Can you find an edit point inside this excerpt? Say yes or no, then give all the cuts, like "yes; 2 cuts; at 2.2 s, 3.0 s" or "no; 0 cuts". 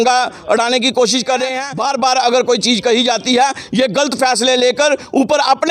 yes; 1 cut; at 1.6 s